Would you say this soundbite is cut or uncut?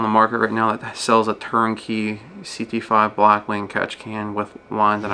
uncut